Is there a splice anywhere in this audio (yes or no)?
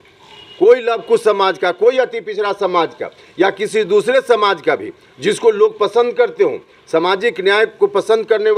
no